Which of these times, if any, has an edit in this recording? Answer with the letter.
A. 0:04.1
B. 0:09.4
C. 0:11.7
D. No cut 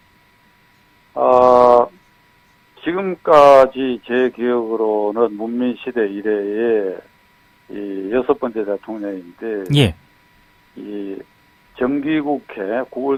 D